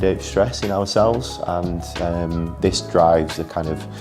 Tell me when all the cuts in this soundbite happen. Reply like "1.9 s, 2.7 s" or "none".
none